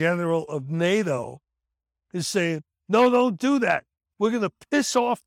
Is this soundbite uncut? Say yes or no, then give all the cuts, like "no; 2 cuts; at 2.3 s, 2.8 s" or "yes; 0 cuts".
no; 1 cut; at 4.0 s